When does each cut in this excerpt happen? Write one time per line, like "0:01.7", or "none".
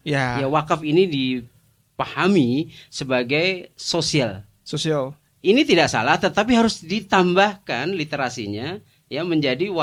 none